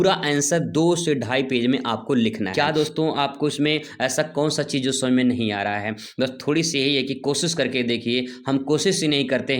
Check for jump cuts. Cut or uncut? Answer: cut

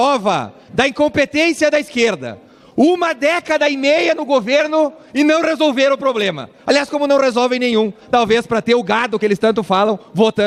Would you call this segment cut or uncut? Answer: uncut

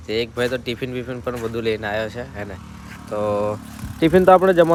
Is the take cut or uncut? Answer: uncut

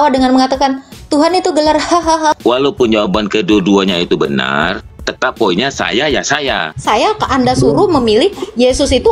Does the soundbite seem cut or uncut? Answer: cut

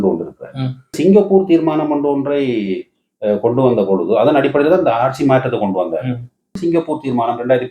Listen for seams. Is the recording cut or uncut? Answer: cut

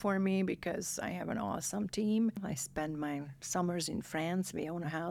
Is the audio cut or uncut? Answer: cut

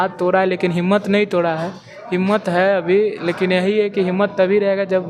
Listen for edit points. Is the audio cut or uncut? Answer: uncut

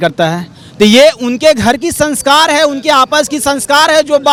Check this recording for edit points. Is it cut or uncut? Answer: uncut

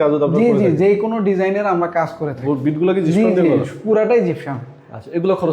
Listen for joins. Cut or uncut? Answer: cut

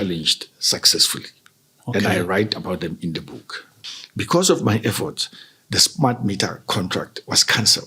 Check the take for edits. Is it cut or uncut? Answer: cut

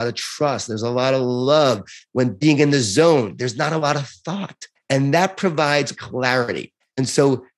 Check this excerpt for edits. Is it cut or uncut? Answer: cut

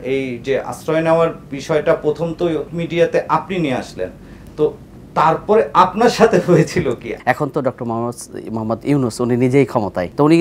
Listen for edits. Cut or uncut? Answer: cut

